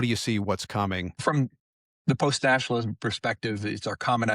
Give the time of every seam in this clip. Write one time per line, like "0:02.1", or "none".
0:01.2